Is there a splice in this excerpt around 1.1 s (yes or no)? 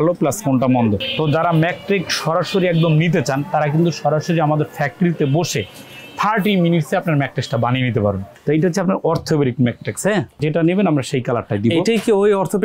yes